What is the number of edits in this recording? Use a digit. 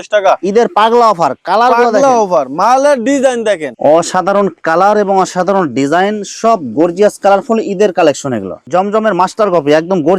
2